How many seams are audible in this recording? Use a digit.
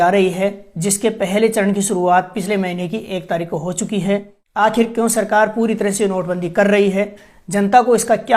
1